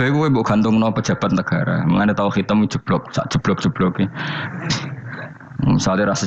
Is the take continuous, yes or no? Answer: no